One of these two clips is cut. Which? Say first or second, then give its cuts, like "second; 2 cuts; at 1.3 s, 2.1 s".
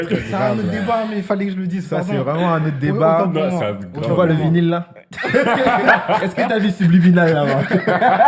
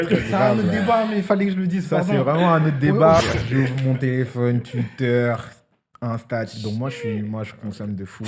second; 1 cut; at 3.2 s